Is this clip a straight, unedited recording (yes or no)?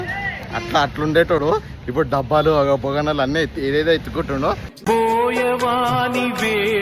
yes